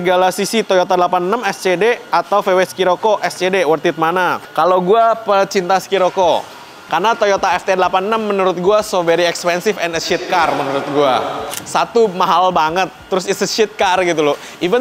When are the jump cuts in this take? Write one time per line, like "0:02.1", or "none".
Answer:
none